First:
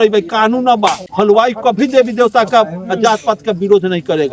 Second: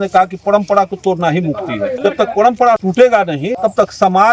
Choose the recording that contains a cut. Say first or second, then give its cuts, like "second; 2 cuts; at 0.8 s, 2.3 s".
second; 3 cuts; at 1.9 s, 2.9 s, 3.5 s